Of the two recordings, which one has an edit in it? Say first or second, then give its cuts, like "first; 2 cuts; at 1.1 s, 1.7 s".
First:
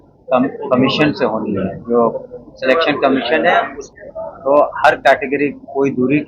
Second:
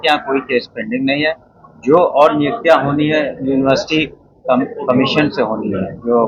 first; 1 cut; at 3.8 s